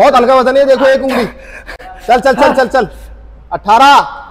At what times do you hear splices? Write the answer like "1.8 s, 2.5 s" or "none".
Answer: none